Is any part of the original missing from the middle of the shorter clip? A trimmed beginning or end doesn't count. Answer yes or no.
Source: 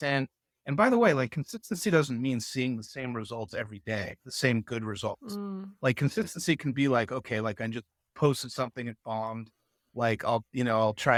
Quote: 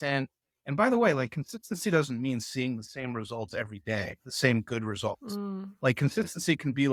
no